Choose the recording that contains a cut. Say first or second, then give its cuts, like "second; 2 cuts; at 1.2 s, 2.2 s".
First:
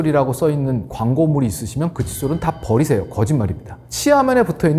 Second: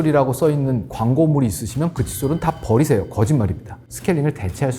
second; 1 cut; at 3.9 s